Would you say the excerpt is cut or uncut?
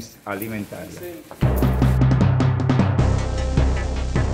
cut